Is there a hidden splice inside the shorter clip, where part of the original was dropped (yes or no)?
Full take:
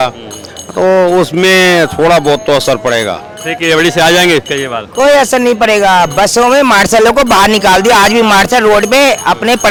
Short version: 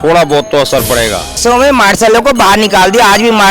yes